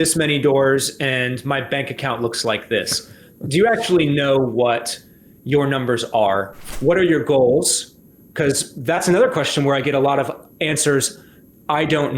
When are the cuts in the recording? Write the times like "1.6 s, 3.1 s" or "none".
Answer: 6.5 s